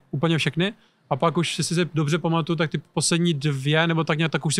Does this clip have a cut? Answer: no; 0 cuts

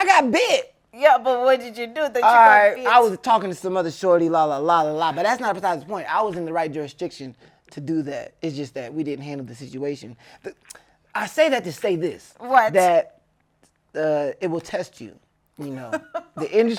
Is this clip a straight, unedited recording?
yes; 0 cuts

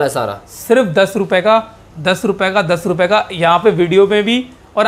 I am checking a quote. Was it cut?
no; 0 cuts

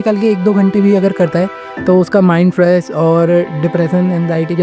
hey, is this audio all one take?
yes; 0 cuts

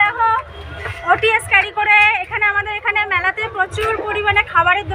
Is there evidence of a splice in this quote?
no; 0 cuts

